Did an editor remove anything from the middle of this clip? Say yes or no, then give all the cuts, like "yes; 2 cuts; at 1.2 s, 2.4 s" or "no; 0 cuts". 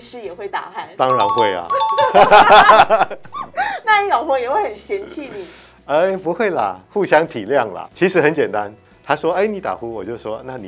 yes; 2 cuts; at 7.8 s, 8.8 s